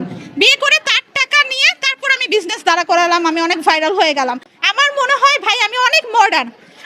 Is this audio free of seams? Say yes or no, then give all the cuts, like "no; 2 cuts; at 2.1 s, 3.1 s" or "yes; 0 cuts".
no; 1 cut; at 4.5 s